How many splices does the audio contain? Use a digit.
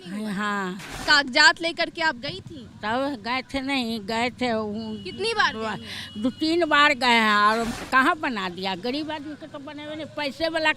2